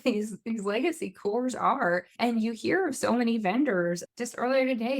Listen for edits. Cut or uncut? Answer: cut